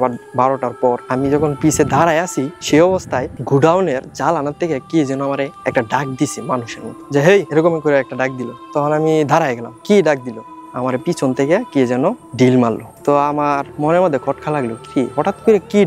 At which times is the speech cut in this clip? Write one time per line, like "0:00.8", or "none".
0:01.0
0:06.9
0:10.6